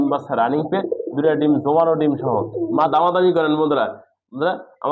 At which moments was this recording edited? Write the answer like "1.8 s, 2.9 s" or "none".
2.9 s